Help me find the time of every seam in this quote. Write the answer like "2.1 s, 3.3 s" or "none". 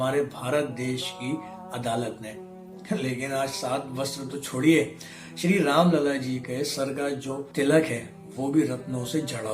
7.5 s